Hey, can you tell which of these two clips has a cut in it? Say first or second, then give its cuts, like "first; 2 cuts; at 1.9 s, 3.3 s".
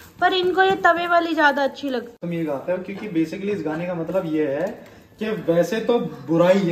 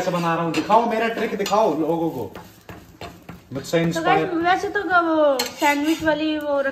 first; 1 cut; at 2.2 s